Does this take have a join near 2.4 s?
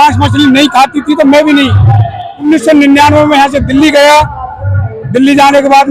yes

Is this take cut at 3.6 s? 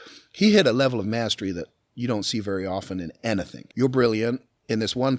yes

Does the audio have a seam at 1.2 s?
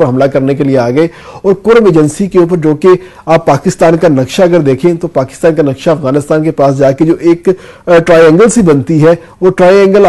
no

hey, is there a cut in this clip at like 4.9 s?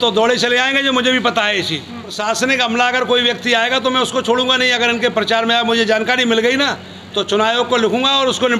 no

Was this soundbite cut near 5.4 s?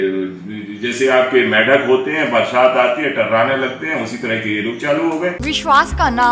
yes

